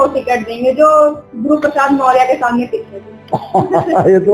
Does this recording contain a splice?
no; 0 cuts

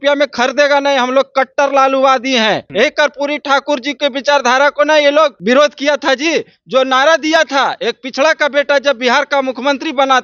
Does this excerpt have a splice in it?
yes; 2 cuts; at 2.7 s, 5.4 s

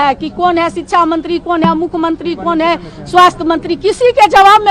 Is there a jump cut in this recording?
no; 0 cuts

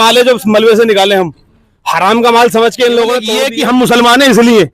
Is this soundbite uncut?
no; 1 cut; at 3.4 s

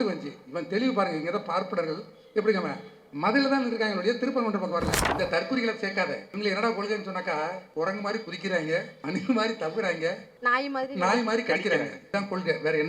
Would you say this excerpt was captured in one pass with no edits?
no; 6 cuts; at 5.0 s, 6.3 s, 7.6 s, 8.9 s, 10.3 s, 12.0 s

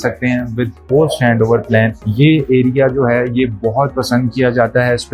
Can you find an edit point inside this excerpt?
no; 0 cuts

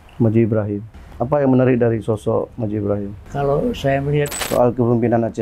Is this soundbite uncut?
no; 2 cuts; at 1.0 s, 4.5 s

